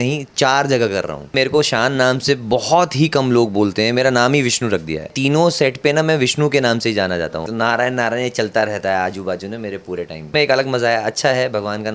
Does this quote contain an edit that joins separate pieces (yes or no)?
yes